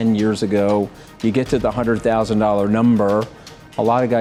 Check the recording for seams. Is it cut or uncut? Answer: uncut